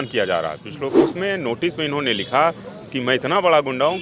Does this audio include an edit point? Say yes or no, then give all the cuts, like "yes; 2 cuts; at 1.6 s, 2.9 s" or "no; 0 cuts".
yes; 1 cut; at 1.0 s